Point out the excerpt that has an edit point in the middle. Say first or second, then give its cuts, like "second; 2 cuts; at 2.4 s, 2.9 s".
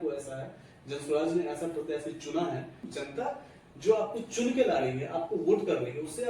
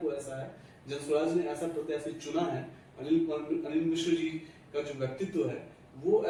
first; 1 cut; at 2.8 s